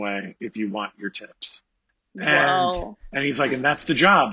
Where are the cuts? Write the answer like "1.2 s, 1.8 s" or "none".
none